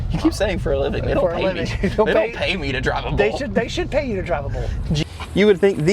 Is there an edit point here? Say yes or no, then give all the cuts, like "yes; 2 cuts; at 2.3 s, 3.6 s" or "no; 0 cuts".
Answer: yes; 1 cut; at 5.0 s